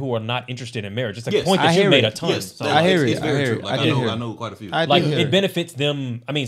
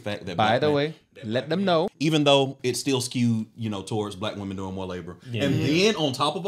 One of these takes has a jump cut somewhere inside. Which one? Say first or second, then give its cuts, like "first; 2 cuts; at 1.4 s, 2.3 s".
second; 1 cut; at 1.9 s